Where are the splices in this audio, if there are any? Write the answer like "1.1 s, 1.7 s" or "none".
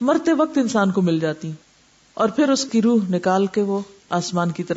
none